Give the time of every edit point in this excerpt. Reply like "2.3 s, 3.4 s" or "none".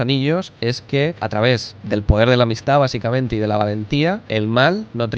1.2 s, 4.2 s